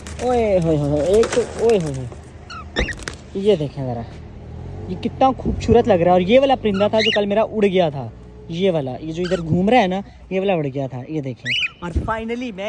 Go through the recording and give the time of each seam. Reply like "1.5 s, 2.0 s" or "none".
none